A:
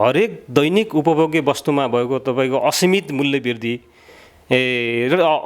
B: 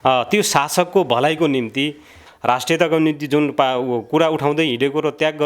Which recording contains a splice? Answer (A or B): B